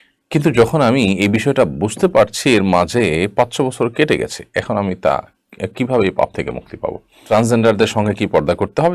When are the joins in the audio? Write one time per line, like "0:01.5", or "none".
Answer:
0:07.2